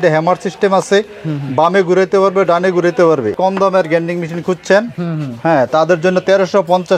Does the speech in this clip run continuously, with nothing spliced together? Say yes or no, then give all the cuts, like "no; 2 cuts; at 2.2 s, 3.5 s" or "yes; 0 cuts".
no; 1 cut; at 3.4 s